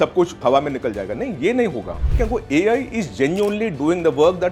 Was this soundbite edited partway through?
yes; 1 cut; at 2.2 s

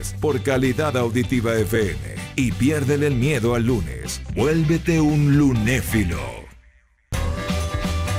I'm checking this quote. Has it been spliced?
no; 0 cuts

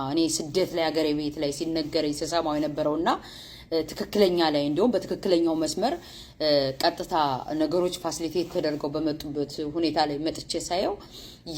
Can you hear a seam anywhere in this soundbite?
no; 0 cuts

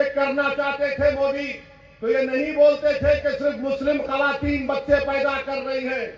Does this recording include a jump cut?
no; 0 cuts

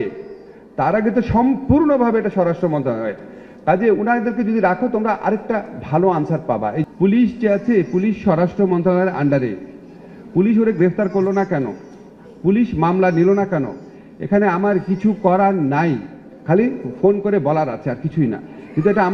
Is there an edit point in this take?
yes; 1 cut; at 6.8 s

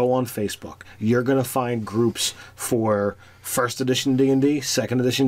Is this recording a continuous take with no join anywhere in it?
yes; 0 cuts

